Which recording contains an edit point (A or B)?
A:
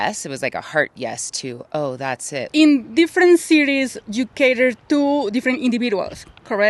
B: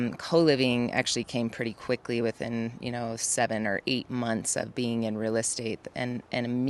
A